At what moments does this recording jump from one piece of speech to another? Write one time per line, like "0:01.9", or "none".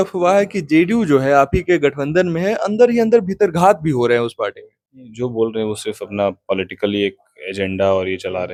none